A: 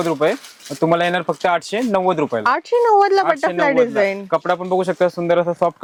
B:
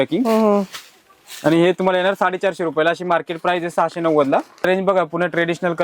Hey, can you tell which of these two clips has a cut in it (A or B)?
B